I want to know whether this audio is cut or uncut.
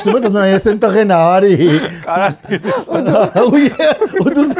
uncut